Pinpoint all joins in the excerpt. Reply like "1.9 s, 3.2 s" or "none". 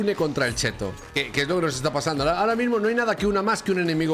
1.0 s